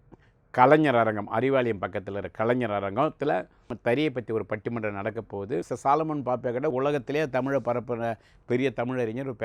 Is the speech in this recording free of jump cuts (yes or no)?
no